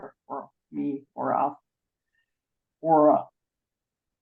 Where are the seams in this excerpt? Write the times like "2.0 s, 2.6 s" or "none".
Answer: 2.6 s